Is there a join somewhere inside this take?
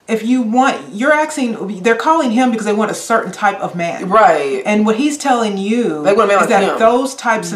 no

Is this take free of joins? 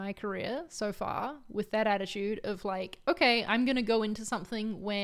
yes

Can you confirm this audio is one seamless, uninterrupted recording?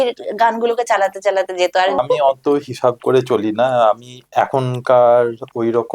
no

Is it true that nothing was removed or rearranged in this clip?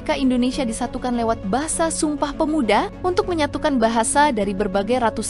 yes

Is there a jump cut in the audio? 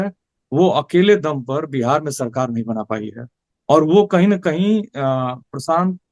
no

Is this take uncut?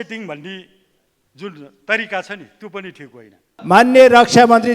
no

